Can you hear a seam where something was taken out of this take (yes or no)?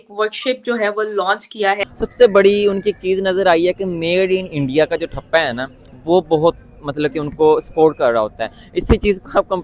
yes